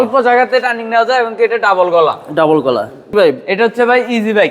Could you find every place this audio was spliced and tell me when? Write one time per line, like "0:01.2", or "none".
0:03.0